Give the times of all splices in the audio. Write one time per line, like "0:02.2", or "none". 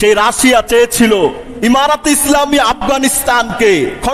0:01.5